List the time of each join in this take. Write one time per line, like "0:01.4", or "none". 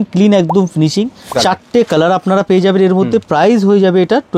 0:01.3
0:03.3

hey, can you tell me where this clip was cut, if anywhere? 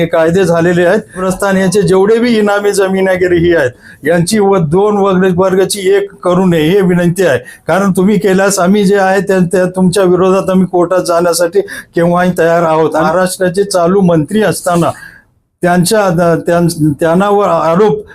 0:01.2
0:13.0

